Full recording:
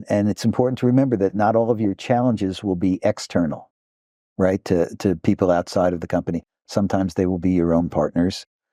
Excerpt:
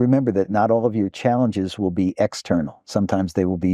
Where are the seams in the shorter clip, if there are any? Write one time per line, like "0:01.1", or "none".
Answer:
0:02.8